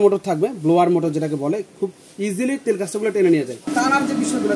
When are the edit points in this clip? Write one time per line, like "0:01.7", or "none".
0:03.6

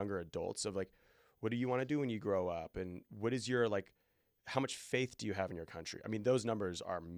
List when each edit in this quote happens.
none

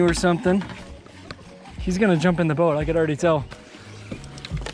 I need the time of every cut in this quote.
none

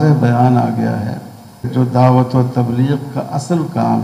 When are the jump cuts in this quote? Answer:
0:01.7

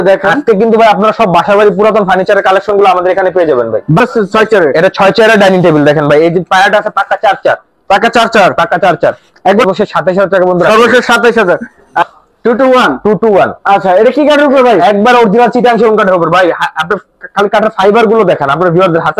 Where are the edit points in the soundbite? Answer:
0:04.0
0:09.6
0:12.1

